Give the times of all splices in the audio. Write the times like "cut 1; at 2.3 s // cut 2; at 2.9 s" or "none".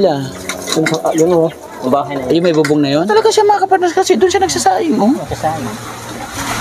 cut 1; at 3.1 s